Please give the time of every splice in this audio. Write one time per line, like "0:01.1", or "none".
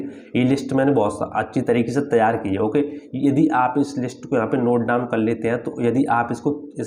none